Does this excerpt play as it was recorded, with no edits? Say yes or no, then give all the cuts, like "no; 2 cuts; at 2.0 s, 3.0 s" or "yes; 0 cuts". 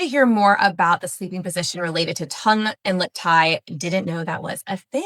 yes; 0 cuts